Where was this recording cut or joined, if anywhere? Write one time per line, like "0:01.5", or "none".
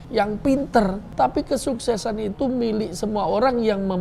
0:01.0